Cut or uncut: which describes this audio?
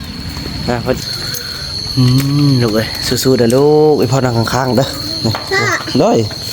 cut